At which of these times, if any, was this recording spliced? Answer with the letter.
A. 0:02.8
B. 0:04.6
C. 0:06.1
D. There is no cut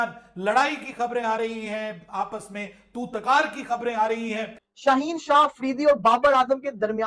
B